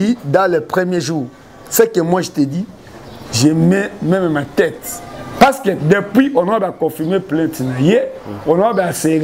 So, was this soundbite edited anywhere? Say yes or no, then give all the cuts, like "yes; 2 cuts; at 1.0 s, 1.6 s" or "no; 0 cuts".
yes; 1 cut; at 5.2 s